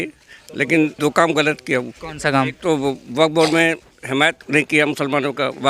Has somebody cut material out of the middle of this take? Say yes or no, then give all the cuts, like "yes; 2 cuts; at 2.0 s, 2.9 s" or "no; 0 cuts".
yes; 3 cuts; at 0.9 s, 2.0 s, 4.4 s